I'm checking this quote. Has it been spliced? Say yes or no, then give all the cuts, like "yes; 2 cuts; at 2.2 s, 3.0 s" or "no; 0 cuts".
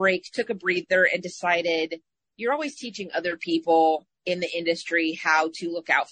no; 0 cuts